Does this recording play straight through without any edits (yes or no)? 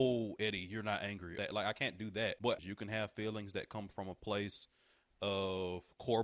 no